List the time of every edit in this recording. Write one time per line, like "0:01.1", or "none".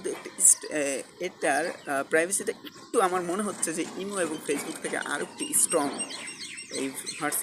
0:01.8